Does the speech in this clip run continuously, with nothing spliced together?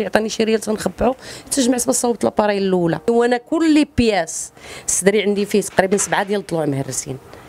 no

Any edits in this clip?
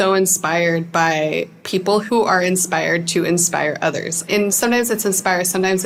no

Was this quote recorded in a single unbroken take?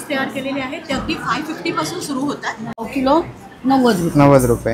no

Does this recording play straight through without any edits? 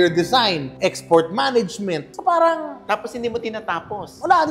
yes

